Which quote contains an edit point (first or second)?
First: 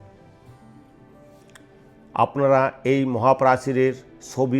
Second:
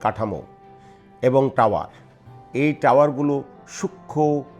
first